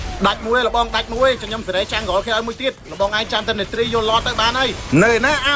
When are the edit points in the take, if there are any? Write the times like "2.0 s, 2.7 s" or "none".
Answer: none